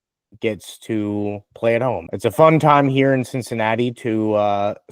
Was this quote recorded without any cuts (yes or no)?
no